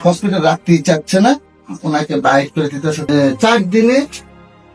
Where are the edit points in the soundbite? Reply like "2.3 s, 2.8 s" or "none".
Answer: 3.0 s